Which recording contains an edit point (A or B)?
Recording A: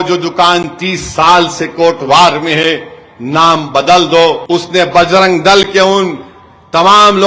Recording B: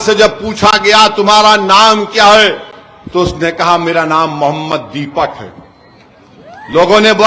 A